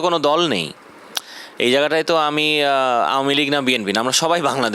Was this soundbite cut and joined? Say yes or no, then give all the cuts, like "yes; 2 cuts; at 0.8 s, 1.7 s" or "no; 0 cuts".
no; 0 cuts